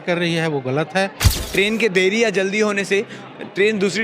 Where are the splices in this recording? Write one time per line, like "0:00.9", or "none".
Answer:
0:01.3